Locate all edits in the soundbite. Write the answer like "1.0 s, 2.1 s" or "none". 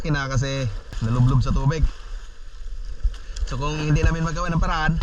0.9 s